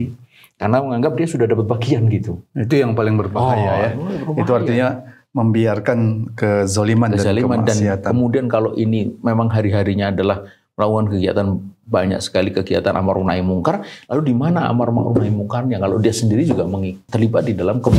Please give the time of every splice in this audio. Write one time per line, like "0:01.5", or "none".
0:17.0